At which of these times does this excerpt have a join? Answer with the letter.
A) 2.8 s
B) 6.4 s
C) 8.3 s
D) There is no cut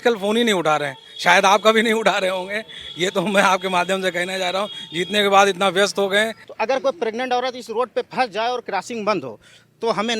B